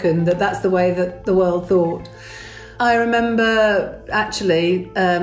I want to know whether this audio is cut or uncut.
cut